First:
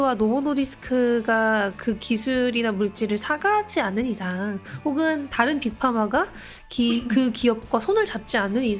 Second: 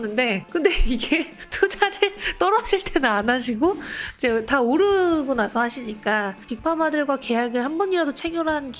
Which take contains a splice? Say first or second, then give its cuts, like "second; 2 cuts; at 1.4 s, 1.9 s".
second; 1 cut; at 6.5 s